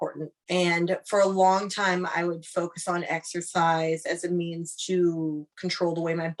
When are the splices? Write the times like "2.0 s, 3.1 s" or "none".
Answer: none